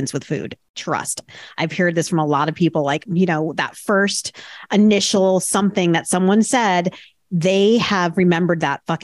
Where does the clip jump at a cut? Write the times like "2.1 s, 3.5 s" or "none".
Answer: 3.0 s